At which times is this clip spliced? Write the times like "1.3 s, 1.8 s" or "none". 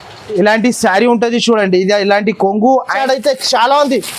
2.9 s